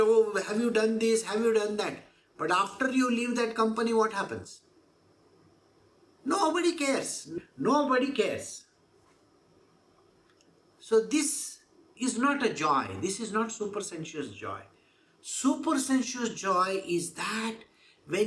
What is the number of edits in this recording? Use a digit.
1